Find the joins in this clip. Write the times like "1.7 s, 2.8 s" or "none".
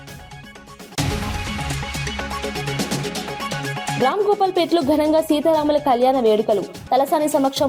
1.0 s, 4.0 s